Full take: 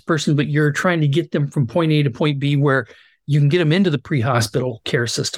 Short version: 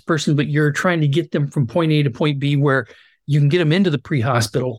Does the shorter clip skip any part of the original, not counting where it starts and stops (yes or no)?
no